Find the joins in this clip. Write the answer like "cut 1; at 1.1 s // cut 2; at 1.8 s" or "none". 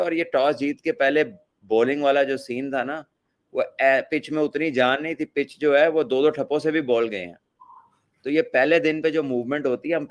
none